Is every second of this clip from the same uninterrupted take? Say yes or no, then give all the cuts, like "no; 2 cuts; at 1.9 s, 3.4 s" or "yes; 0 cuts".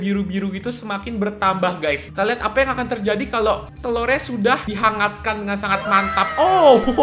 no; 3 cuts; at 2.1 s, 3.7 s, 4.7 s